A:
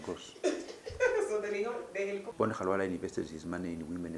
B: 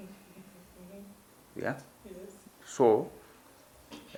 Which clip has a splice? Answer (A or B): A